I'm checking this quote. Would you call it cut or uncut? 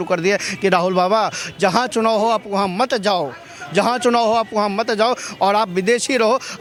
uncut